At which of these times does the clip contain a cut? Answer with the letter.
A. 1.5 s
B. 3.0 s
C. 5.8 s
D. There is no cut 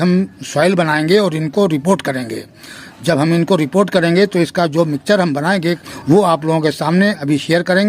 C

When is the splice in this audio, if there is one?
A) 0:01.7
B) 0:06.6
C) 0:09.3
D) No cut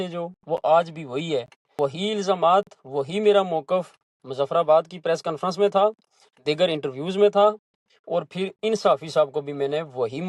A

